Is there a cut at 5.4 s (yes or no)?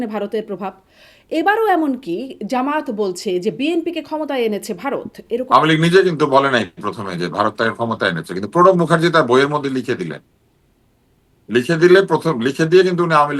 yes